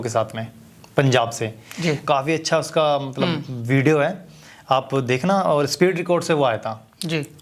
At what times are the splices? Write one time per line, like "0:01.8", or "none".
0:02.0